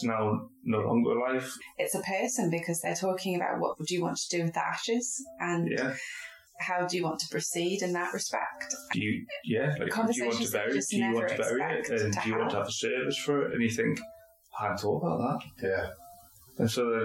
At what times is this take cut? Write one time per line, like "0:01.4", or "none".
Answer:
0:06.5